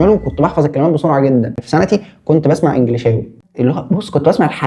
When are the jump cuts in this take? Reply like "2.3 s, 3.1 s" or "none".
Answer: 1.6 s, 3.3 s